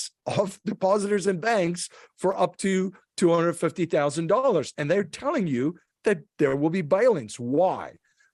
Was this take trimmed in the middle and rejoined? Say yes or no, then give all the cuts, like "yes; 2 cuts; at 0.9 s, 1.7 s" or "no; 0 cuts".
no; 0 cuts